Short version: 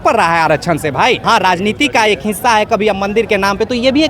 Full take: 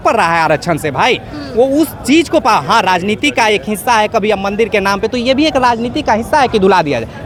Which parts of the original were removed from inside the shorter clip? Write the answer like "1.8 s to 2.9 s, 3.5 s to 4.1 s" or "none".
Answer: 1.2 s to 2.7 s